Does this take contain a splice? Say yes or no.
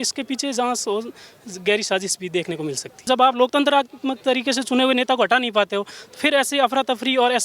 yes